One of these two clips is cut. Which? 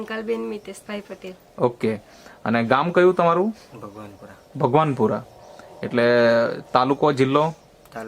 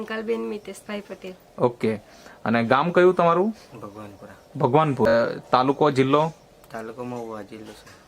second; 1 cut; at 5.1 s

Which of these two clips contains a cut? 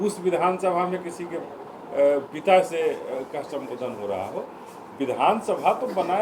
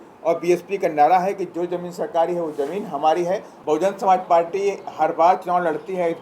second; 1 cut; at 3.5 s

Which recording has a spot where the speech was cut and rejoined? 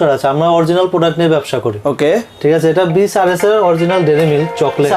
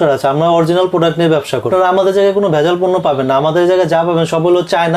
second; 1 cut; at 1.7 s

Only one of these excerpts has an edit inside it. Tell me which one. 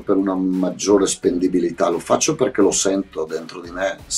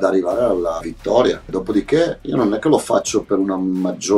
second; 2 cuts; at 0.9 s, 2.2 s

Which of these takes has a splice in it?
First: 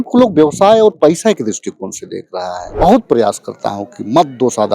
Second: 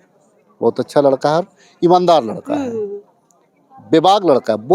first; 1 cut; at 2.6 s

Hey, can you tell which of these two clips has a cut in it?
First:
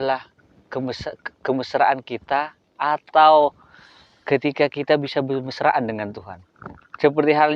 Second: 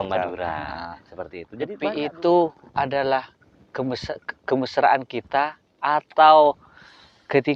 second; 1 cut; at 1.8 s

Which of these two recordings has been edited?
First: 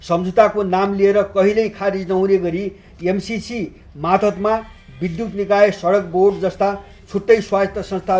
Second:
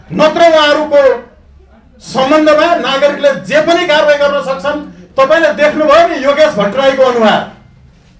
second; 1 cut; at 4.9 s

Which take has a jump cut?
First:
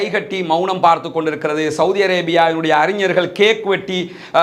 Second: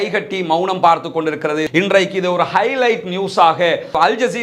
second; 1 cut; at 1.7 s

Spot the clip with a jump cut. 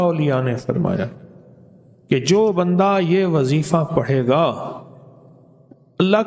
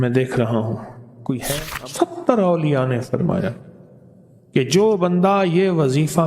second; 1 cut; at 1.5 s

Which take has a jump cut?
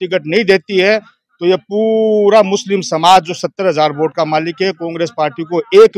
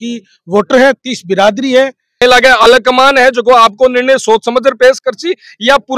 second; 1 cut; at 2.2 s

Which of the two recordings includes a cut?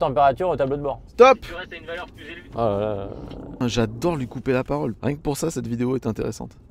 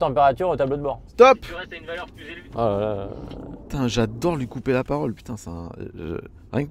first; 2 cuts; at 3.5 s, 5.0 s

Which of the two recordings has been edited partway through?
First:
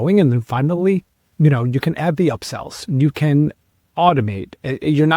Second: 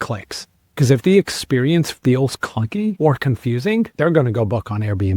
second; 2 cuts; at 3.0 s, 3.9 s

